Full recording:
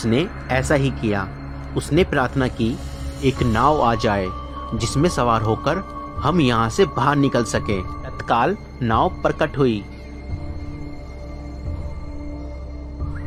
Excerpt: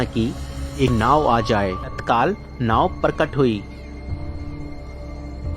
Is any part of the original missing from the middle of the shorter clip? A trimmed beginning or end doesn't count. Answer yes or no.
yes